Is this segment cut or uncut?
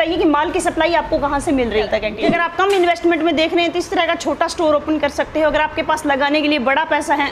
cut